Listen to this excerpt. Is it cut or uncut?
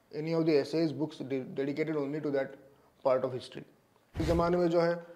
cut